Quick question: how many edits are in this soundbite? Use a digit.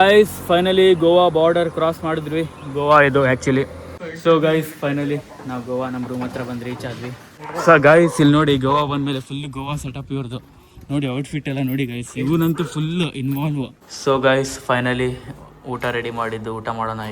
3